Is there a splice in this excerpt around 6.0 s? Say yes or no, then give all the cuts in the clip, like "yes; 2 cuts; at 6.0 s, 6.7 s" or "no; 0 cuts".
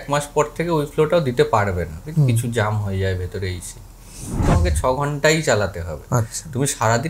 no; 1 cut; at 4.4 s